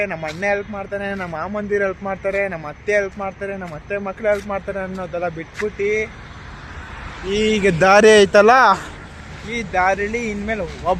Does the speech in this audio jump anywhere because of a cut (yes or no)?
no